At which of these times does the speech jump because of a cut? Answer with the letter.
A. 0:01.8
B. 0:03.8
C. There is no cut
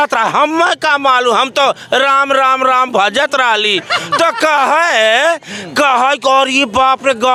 C